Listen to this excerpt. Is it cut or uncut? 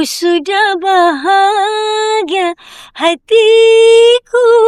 uncut